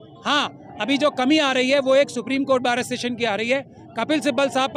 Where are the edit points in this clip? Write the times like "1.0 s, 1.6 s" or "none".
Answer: none